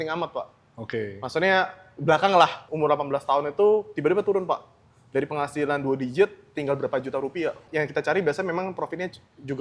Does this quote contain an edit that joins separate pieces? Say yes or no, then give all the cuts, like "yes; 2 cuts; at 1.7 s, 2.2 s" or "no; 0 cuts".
yes; 2 cuts; at 2.6 s, 7.6 s